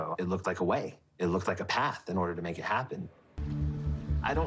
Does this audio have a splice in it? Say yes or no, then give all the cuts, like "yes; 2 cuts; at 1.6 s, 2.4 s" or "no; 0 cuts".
yes; 1 cut; at 3.5 s